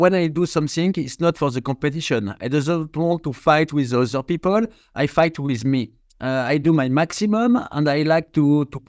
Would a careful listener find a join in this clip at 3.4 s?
no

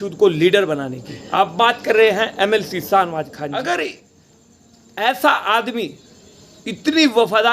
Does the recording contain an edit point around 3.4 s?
yes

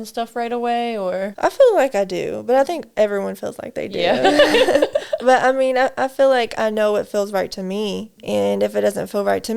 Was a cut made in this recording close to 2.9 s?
no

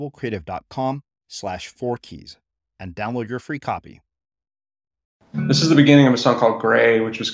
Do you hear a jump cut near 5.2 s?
yes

